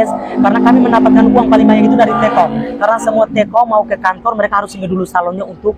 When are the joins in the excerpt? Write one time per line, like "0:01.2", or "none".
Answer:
none

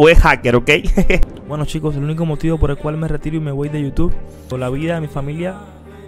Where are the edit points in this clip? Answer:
0:01.2
0:04.5

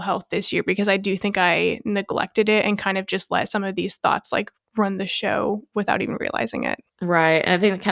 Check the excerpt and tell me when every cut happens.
0:06.9

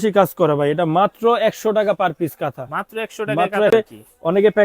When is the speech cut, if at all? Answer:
0:03.7

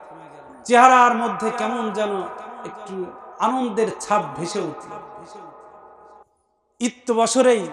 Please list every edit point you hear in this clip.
0:06.2

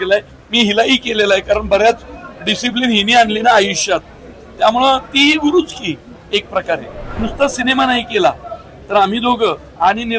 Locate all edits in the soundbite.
0:07.2

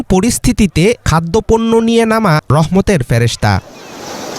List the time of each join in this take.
0:02.4

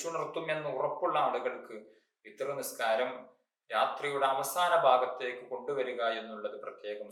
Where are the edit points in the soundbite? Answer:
none

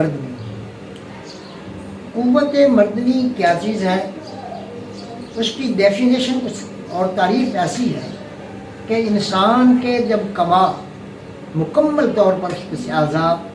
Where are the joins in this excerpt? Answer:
none

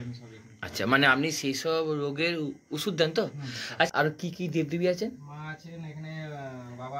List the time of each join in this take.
0:03.9

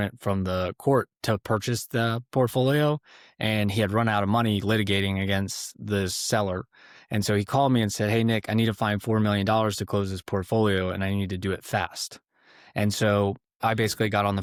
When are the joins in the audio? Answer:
none

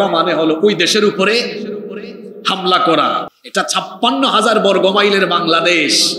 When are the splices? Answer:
0:03.4

